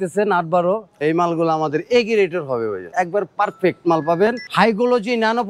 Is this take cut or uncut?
cut